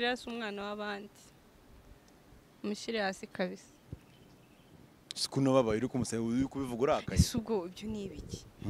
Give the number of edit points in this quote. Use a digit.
0